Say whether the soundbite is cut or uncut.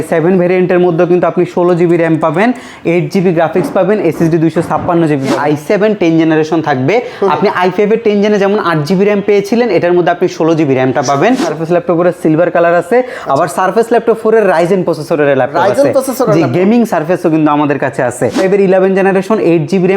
cut